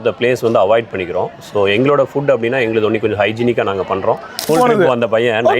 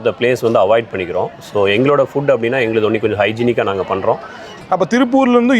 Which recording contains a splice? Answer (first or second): first